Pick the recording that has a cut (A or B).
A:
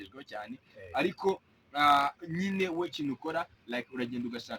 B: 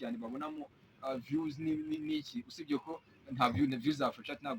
A